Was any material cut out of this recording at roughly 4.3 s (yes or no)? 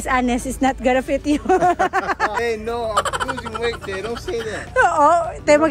no